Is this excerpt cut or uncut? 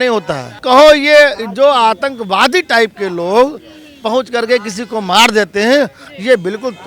uncut